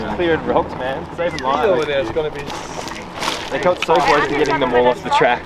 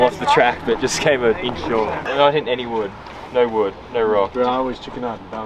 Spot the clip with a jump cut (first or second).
second